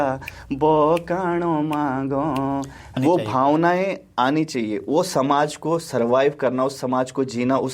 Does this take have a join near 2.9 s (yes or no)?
yes